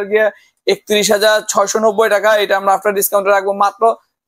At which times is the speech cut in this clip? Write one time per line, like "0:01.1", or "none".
none